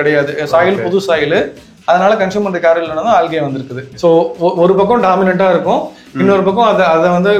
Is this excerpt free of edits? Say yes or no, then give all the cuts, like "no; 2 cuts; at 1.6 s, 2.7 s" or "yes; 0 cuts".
no; 1 cut; at 3.9 s